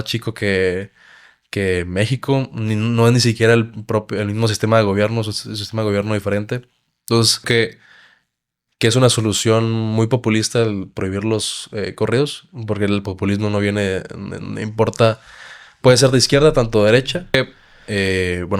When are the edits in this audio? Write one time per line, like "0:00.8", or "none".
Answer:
0:07.5
0:17.3